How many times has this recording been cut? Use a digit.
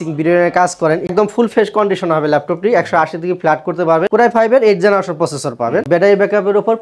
3